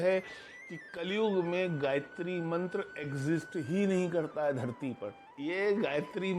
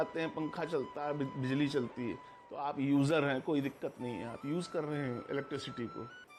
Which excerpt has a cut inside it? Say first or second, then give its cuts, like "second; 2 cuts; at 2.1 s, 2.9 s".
first; 1 cut; at 5.3 s